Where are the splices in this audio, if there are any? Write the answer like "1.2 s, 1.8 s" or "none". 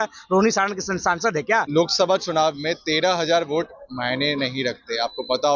1.7 s